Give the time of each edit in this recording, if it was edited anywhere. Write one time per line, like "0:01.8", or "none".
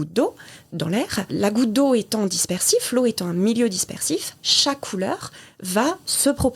0:01.3